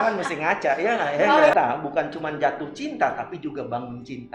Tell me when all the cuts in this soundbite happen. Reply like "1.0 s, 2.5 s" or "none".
1.5 s